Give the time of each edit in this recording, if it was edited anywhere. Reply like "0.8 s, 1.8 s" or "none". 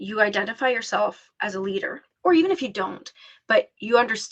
2.0 s